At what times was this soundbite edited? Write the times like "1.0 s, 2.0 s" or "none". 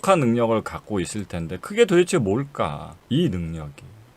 2.9 s